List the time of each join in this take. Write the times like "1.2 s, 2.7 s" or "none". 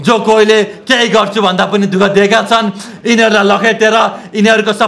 2.9 s